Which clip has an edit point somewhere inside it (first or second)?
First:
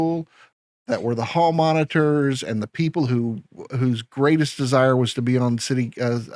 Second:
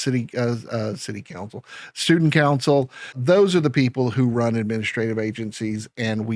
second